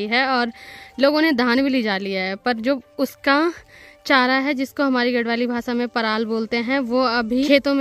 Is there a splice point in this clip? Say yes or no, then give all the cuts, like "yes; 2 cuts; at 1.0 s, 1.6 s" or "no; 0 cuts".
no; 0 cuts